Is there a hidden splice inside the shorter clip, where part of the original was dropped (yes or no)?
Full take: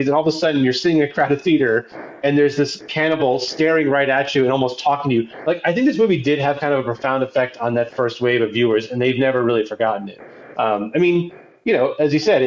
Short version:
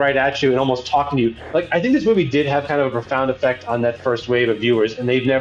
no